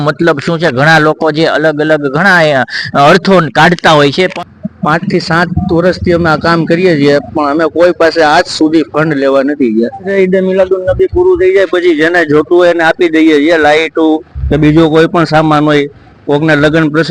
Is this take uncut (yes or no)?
no